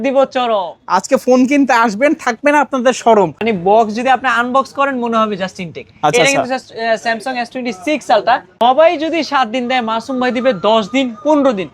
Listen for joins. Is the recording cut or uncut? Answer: cut